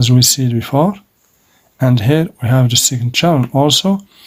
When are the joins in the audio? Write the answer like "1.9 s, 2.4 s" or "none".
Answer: none